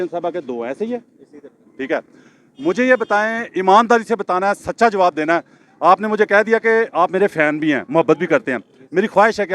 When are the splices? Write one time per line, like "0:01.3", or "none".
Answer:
none